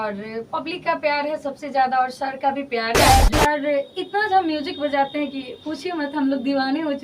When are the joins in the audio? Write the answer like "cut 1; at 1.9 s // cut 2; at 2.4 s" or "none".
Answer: cut 1; at 3.3 s